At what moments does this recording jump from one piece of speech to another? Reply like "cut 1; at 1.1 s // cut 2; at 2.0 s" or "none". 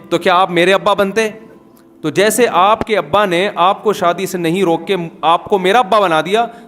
none

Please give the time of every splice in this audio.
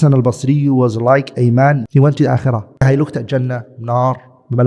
cut 1; at 1.8 s // cut 2; at 2.8 s

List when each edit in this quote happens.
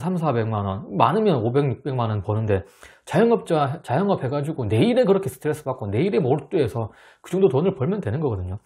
none

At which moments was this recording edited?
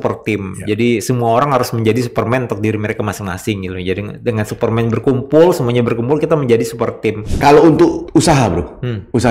cut 1; at 7.3 s // cut 2; at 8.0 s

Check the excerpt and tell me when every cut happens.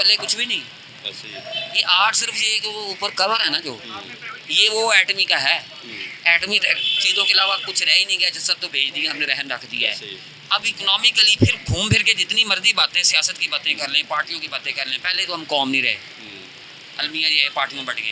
none

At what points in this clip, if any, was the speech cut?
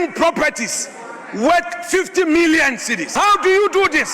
cut 1; at 3.0 s

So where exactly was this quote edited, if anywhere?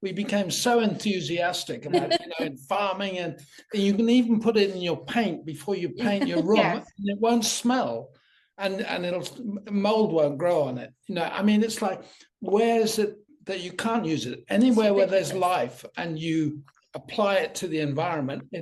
none

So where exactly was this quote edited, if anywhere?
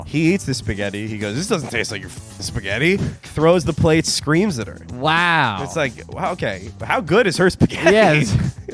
cut 1; at 3.3 s

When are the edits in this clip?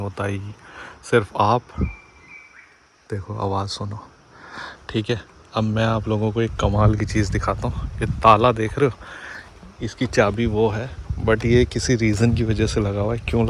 none

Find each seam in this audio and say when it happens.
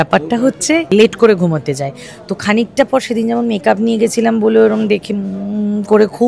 cut 1; at 0.9 s

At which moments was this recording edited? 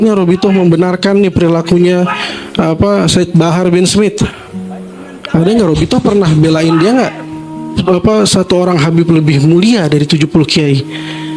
cut 1; at 7.7 s

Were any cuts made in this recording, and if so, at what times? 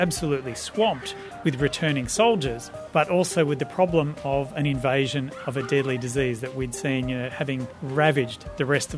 cut 1; at 7.8 s

